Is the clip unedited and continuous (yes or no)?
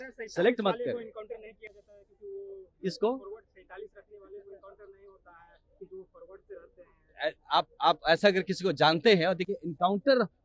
yes